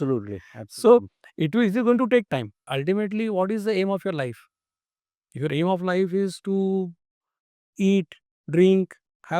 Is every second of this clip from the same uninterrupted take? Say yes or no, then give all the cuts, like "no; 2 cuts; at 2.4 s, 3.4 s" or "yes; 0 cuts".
no; 1 cut; at 2.7 s